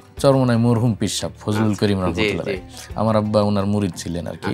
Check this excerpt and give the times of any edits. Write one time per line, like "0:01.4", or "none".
none